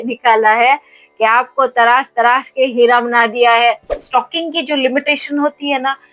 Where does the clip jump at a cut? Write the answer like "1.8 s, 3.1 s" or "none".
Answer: 4.0 s